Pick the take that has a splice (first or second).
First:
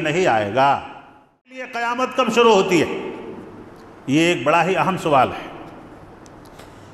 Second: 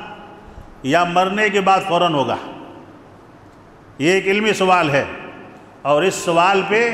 first